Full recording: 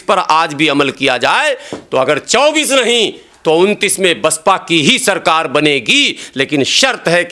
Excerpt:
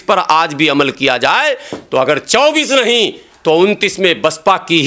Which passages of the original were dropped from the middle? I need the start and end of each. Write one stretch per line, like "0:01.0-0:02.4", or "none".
none